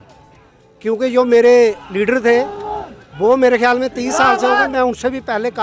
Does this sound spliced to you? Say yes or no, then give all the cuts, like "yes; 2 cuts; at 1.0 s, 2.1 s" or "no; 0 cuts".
no; 0 cuts